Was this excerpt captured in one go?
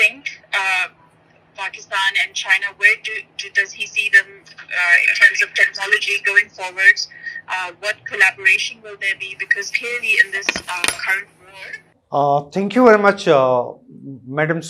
yes; 0 cuts

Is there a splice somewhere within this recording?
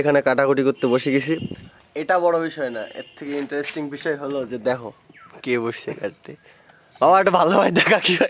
no; 0 cuts

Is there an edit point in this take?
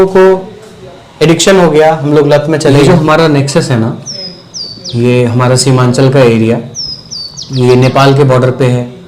yes; 1 cut; at 2.8 s

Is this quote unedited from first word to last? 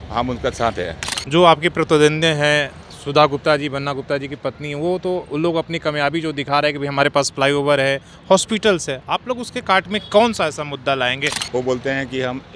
no; 2 cuts; at 1.1 s, 11.3 s

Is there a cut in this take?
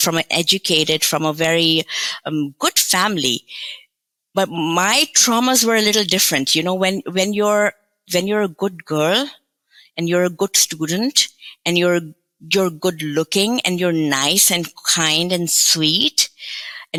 no; 0 cuts

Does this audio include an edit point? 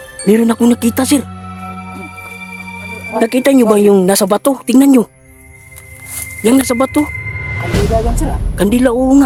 no; 0 cuts

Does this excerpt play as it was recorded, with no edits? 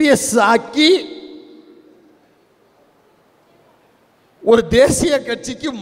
yes; 0 cuts

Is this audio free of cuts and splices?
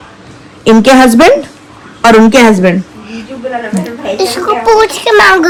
yes; 0 cuts

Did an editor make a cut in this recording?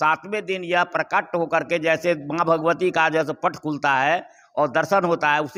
no; 0 cuts

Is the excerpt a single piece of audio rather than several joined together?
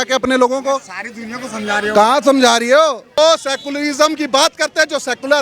no; 1 cut; at 3.0 s

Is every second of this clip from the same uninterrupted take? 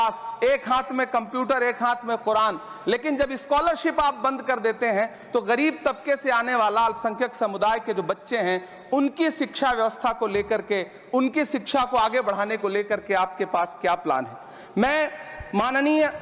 yes; 0 cuts

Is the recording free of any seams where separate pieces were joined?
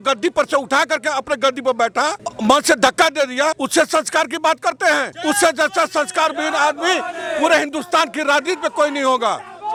yes; 0 cuts

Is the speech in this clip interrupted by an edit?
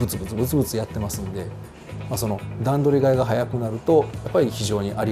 no; 0 cuts

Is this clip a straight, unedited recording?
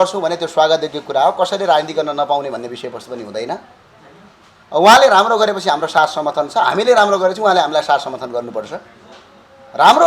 yes; 0 cuts

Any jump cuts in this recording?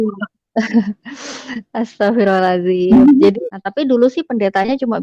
yes; 1 cut; at 3.4 s

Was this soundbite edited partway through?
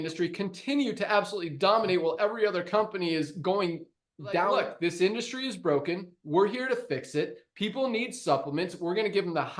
yes; 1 cut; at 4.5 s

